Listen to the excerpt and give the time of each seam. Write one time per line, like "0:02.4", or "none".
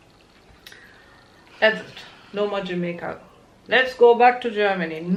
none